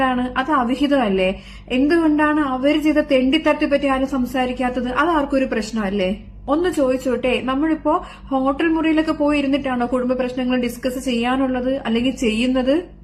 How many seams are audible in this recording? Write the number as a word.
zero